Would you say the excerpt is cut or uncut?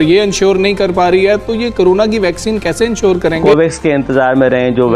cut